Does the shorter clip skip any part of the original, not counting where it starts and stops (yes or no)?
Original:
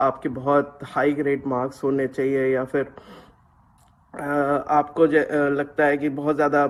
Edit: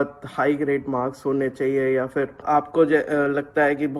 yes